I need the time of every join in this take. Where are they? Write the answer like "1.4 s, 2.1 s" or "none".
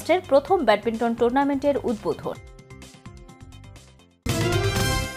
4.3 s